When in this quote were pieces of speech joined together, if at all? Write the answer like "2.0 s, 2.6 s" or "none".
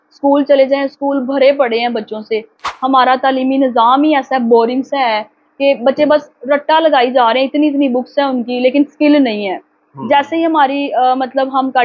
none